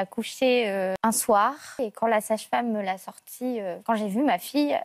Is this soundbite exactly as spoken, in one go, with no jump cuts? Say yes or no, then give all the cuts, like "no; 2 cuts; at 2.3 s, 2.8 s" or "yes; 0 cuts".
no; 3 cuts; at 1.0 s, 1.8 s, 3.8 s